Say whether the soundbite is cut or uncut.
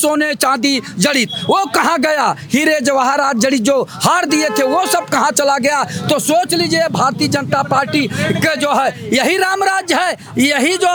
uncut